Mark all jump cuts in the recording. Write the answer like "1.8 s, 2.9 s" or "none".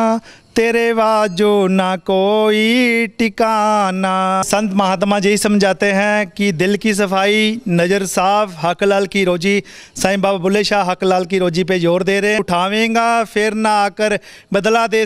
4.4 s, 12.4 s